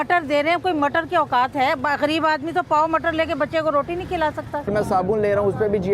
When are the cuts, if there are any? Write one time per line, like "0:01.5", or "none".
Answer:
0:04.7